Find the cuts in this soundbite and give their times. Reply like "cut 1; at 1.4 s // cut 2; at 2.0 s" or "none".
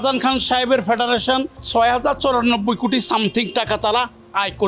cut 1; at 1.6 s